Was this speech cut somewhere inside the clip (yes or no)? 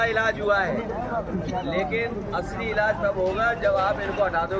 no